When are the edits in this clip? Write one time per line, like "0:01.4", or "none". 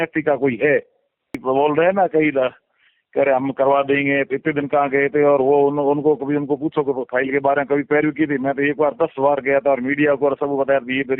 0:01.4